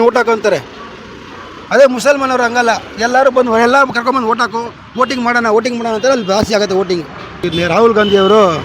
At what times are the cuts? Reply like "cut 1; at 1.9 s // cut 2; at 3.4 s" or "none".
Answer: cut 1; at 7.4 s